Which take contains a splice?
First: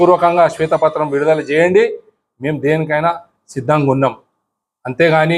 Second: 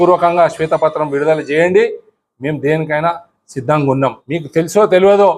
second; 1 cut; at 4.3 s

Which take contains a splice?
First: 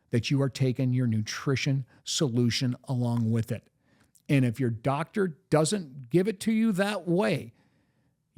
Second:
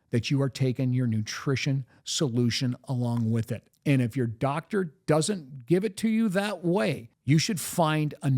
second; 2 cuts; at 3.6 s, 7.1 s

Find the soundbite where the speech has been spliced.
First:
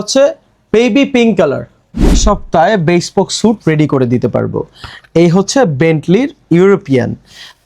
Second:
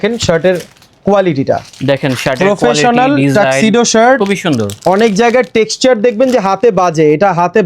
first; 1 cut; at 2.2 s

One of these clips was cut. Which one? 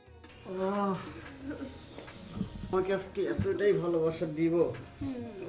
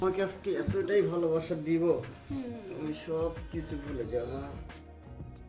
second; 1 cut; at 4.6 s

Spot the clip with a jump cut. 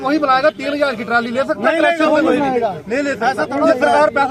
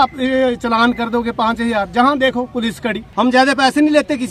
second; 1 cut; at 3.0 s

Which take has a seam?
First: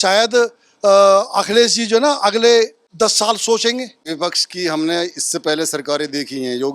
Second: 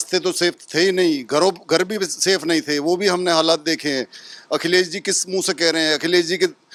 first; 2 cuts; at 2.8 s, 4.1 s

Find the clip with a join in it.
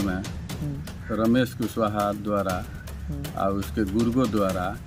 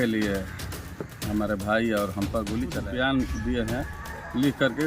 second; 1 cut; at 2.8 s

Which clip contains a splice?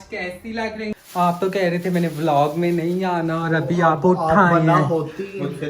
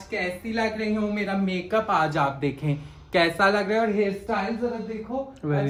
first; 1 cut; at 0.9 s

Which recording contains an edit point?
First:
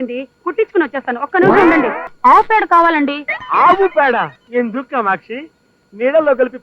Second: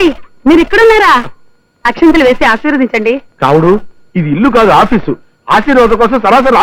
first; 2 cuts; at 2.1 s, 4.4 s

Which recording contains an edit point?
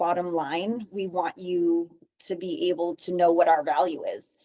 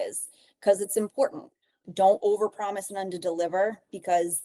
second; 1 cut; at 1.8 s

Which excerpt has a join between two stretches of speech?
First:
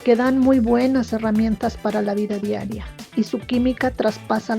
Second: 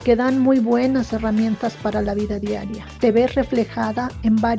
first; 1 cut; at 3.0 s

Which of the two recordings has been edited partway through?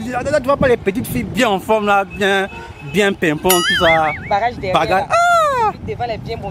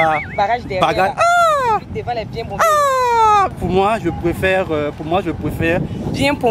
second; 1 cut; at 3.5 s

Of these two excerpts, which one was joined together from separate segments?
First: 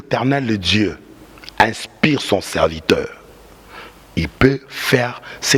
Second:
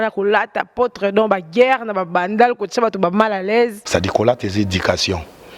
second; 1 cut; at 3.8 s

